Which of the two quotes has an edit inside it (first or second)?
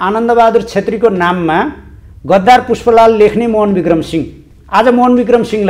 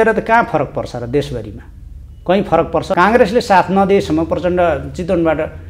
second